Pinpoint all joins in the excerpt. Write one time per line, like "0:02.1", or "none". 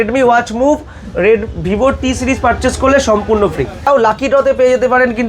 0:03.9